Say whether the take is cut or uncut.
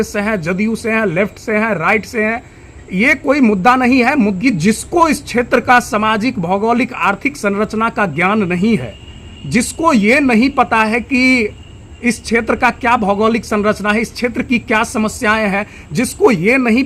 cut